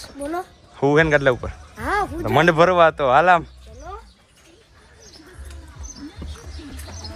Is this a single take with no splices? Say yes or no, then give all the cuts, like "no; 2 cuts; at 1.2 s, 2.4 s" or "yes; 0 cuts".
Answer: yes; 0 cuts